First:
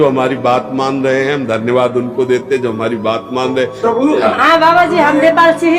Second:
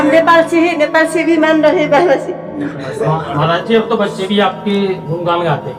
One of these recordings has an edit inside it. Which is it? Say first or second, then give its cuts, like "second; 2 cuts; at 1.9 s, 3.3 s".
first; 1 cut; at 3.8 s